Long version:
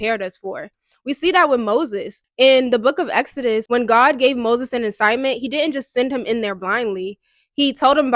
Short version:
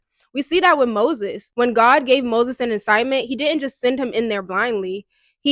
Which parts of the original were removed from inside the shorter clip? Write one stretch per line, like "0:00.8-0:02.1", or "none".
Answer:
0:02.2-0:03.6